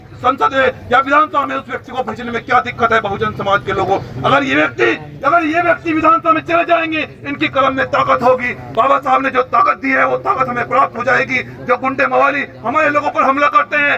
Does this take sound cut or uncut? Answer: uncut